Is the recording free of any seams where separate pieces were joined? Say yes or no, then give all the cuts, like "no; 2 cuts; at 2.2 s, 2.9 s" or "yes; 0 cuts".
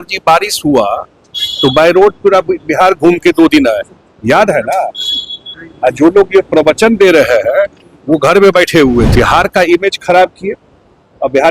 no; 1 cut; at 9.1 s